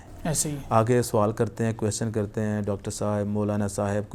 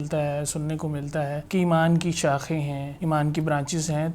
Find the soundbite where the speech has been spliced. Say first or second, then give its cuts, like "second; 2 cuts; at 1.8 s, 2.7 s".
second; 2 cuts; at 1.4 s, 2.8 s